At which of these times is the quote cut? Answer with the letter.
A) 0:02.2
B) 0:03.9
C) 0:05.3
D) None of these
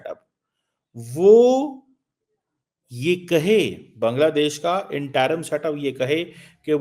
D